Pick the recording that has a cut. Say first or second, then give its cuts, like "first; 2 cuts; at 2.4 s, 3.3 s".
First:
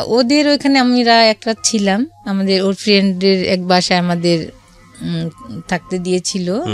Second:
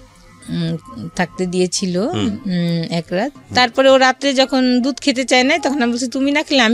second; 1 cut; at 3.4 s